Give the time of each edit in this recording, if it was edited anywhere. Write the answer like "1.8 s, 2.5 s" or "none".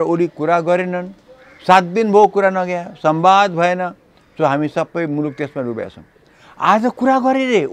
none

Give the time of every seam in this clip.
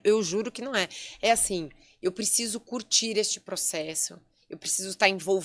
none

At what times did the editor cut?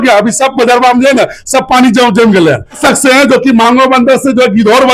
2.8 s

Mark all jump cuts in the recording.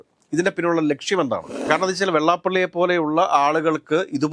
1.6 s

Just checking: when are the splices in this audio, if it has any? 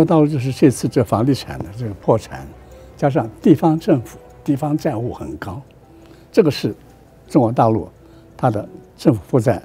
4.3 s

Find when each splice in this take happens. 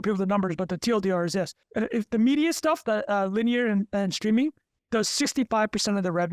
1.6 s, 4.7 s

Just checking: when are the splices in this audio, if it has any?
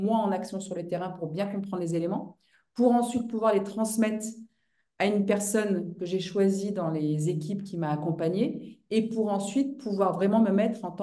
none

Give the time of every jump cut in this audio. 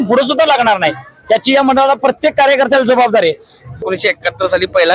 3.8 s

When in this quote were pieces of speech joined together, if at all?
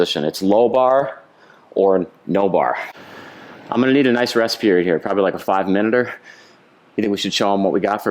2.9 s

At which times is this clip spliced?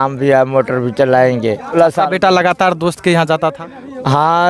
1.8 s

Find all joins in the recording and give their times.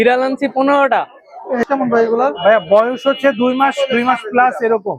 1.6 s

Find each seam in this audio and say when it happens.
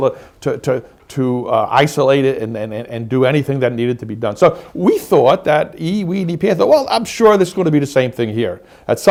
none

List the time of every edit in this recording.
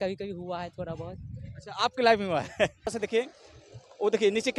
2.9 s

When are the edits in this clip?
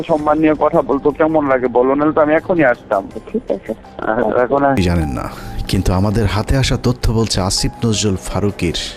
4.8 s

